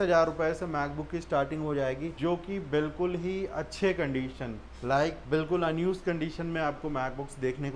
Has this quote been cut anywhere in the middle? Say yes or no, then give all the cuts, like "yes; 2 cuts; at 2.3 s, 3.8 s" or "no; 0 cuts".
no; 0 cuts